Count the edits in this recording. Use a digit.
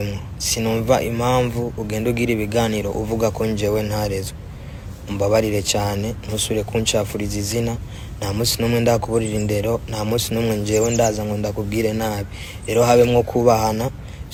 0